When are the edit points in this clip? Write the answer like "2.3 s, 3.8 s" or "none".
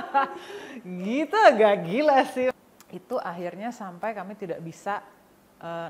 2.5 s

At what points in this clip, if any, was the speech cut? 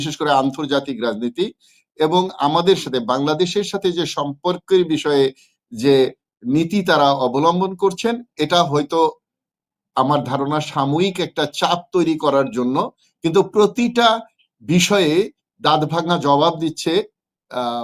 none

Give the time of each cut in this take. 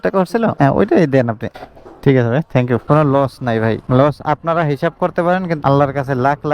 2.8 s, 5.6 s

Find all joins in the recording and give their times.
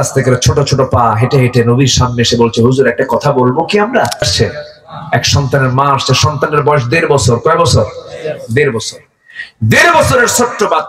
4.3 s

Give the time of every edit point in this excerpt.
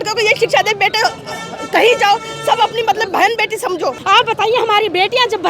4.0 s

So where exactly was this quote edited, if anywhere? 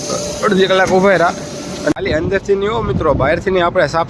1.9 s

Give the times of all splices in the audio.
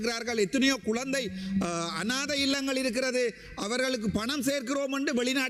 none

